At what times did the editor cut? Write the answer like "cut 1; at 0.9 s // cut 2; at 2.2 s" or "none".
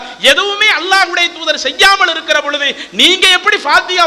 none